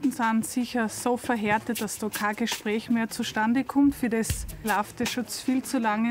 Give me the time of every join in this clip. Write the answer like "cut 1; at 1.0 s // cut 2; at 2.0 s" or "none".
cut 1; at 4.6 s